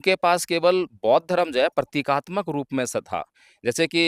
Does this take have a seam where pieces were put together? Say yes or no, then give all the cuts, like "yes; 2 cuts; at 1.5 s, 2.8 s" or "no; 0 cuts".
no; 0 cuts